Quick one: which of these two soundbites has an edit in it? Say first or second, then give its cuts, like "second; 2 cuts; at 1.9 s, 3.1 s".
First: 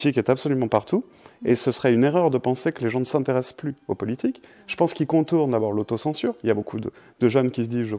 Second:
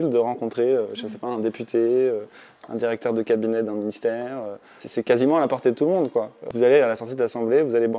second; 2 cuts; at 4.8 s, 6.5 s